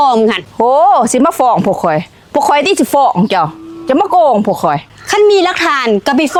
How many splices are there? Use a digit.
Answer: 0